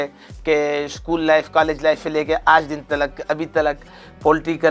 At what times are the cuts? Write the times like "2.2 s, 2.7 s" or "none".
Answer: none